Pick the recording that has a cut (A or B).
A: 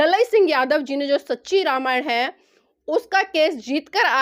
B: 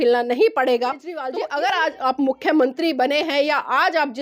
B